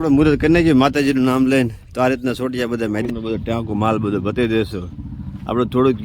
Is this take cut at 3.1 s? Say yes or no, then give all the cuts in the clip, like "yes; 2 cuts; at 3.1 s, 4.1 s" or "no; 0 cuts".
yes; 1 cut; at 3.1 s